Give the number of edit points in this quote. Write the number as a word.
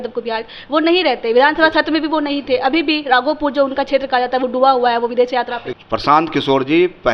one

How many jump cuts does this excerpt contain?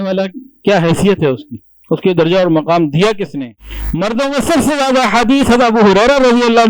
one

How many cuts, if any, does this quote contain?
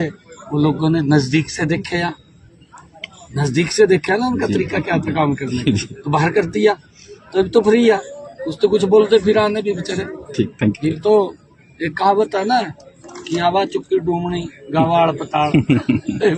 one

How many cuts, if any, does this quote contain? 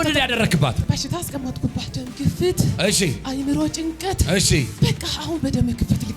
three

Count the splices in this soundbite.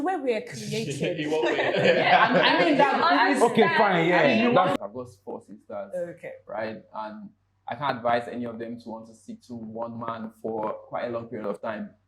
one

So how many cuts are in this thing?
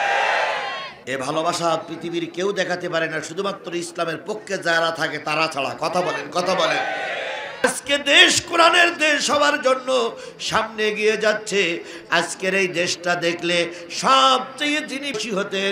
one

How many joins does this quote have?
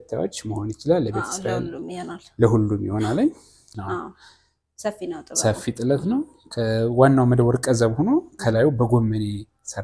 one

